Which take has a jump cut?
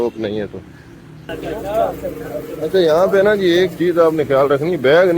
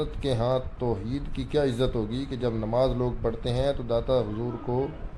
first; 1 cut; at 1.3 s

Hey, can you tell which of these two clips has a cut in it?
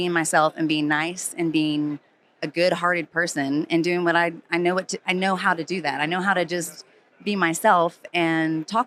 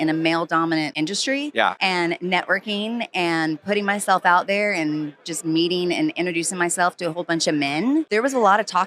second; 3 cuts; at 0.9 s, 1.8 s, 8.1 s

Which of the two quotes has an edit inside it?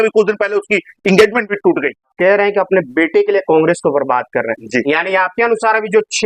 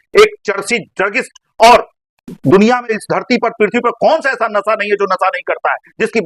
first; 1 cut; at 2.1 s

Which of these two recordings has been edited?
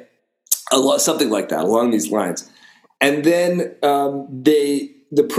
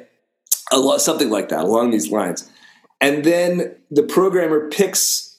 second; 1 cut; at 3.7 s

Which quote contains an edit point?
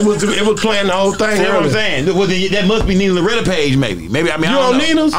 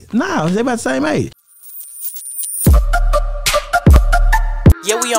second; 1 cut; at 1.4 s

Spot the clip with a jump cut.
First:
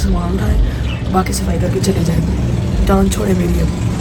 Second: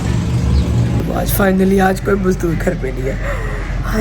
second; 1 cut; at 1.0 s

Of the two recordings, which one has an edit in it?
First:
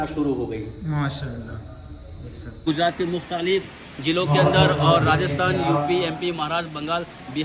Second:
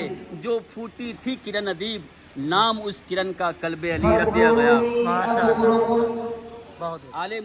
first; 1 cut; at 2.3 s

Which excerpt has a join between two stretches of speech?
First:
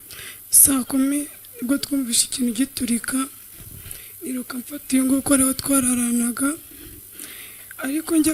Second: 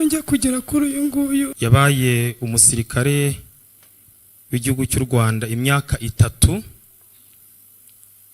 second; 1 cut; at 1.5 s

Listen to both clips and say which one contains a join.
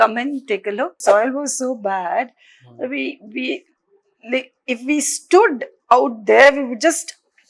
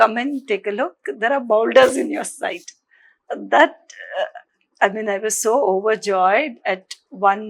first; 1 cut; at 1.0 s

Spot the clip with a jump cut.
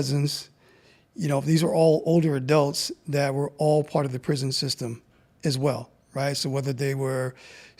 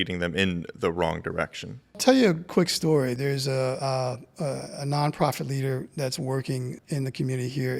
second; 3 cuts; at 1.9 s, 3.2 s, 6.8 s

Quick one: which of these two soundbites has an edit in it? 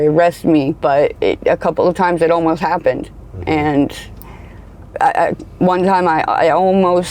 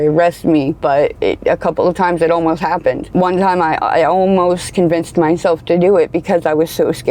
second; 1 cut; at 3.0 s

